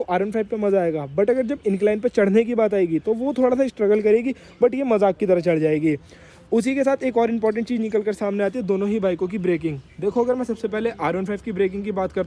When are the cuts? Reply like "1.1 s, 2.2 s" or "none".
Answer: none